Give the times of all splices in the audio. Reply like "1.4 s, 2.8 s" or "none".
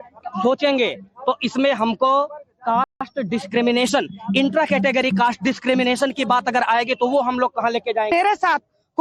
none